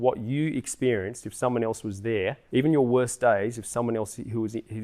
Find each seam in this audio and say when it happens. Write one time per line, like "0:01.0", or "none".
0:02.4